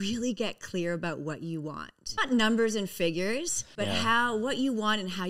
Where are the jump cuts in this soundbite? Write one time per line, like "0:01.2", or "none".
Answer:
0:02.0
0:03.6

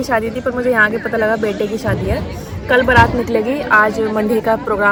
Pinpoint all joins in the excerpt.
none

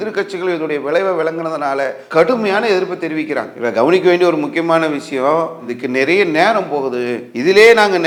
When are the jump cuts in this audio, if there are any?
none

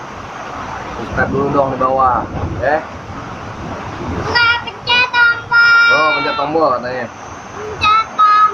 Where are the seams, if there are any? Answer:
0:04.2

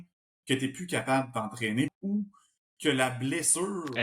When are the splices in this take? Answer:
0:01.9

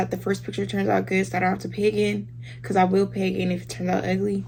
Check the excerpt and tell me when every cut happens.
none

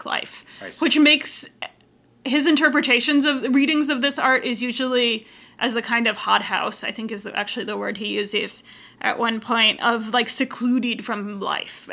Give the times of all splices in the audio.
none

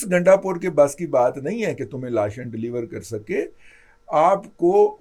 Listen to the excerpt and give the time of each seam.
none

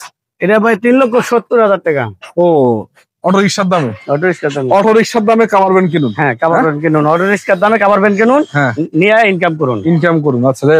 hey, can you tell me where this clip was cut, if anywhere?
none

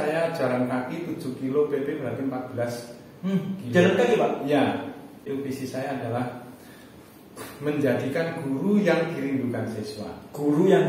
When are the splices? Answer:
0:05.3

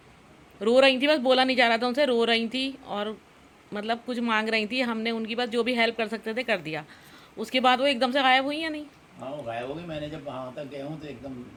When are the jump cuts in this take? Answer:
none

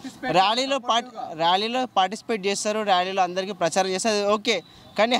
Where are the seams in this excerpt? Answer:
none

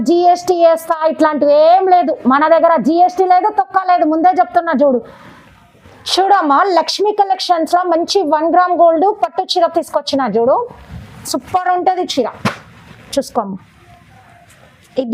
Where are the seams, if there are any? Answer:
none

